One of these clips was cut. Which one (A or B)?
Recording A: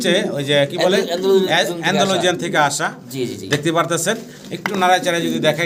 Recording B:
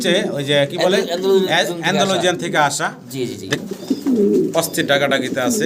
B